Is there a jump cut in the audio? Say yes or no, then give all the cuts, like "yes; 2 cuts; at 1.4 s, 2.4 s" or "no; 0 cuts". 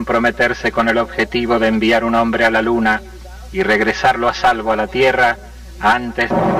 yes; 1 cut; at 4.9 s